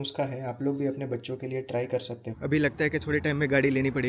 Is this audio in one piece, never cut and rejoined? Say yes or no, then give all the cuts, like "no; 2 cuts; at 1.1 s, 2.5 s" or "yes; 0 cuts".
no; 1 cut; at 2.2 s